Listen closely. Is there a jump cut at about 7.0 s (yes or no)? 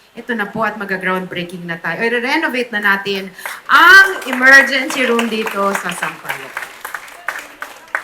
no